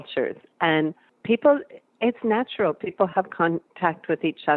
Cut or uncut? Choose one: cut